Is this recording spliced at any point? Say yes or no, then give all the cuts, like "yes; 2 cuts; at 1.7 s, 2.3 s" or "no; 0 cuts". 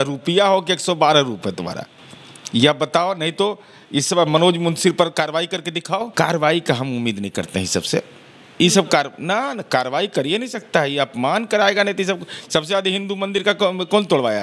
yes; 1 cut; at 6.1 s